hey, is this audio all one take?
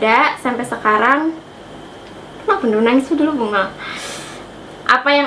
yes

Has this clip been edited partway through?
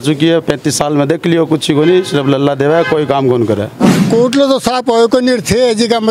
yes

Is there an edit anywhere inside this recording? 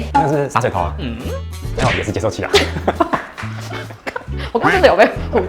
no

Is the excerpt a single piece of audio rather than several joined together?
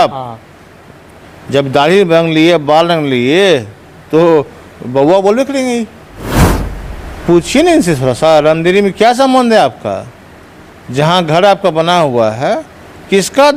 yes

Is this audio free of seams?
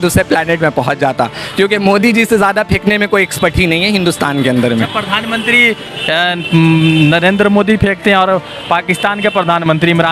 yes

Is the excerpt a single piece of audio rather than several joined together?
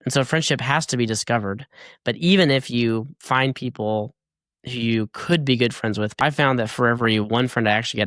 no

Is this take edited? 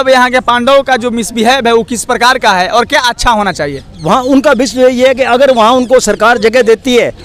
no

